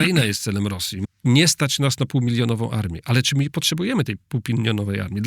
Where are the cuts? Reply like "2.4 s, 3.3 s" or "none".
0.9 s